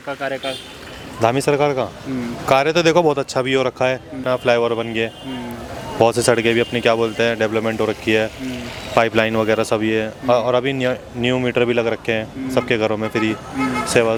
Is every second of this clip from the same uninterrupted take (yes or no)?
yes